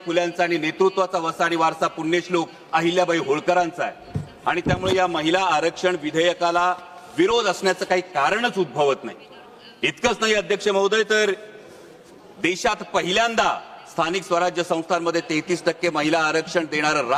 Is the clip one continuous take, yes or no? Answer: yes